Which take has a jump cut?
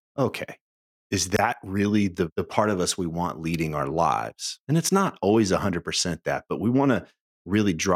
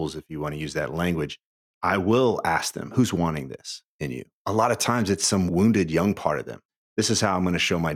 second; 5 cuts; at 1.7 s, 2.9 s, 4.4 s, 5.5 s, 6.8 s

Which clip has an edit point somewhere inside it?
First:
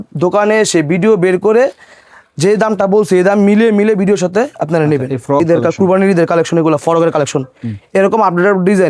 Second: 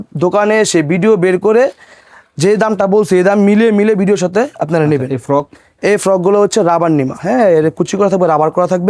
first; 1 cut; at 5.4 s

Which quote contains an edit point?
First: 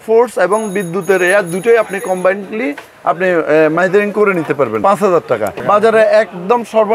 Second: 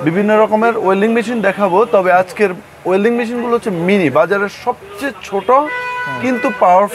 first; 2 cuts; at 4.8 s, 5.6 s

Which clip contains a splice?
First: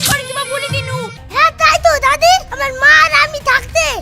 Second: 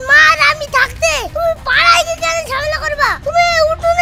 first; 1 cut; at 1.2 s

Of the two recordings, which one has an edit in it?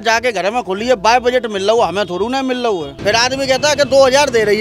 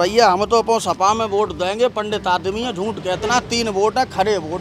first; 1 cut; at 2.9 s

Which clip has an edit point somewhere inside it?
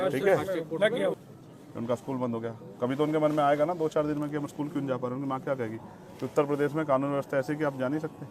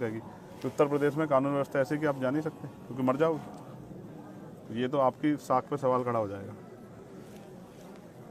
first; 1 cut; at 1.2 s

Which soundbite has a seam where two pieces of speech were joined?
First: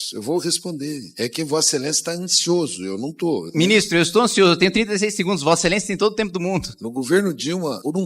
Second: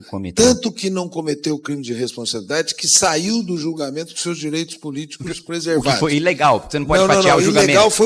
first; 2 cuts; at 3.5 s, 6.7 s

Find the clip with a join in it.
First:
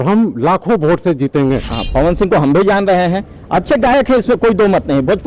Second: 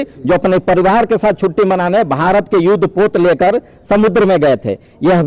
first; 1 cut; at 1.7 s

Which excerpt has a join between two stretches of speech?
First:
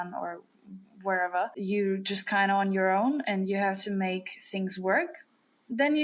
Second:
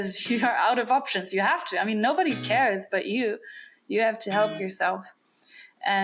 first; 1 cut; at 1.6 s

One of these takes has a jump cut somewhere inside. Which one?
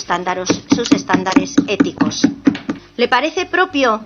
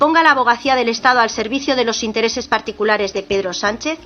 first; 1 cut; at 2.7 s

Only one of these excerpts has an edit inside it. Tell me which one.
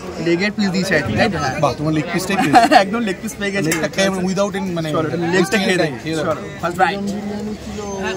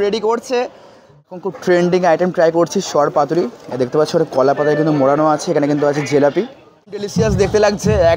second; 2 cuts; at 1.3 s, 7.1 s

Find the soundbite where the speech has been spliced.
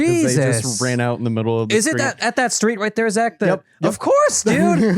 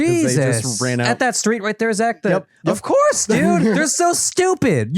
second; 2 cuts; at 1.1 s, 3.8 s

